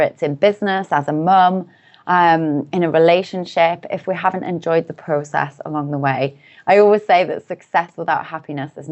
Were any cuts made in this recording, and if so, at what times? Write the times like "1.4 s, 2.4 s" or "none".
7.9 s